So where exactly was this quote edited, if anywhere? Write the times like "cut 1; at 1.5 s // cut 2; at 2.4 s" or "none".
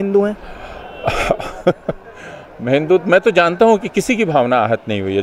none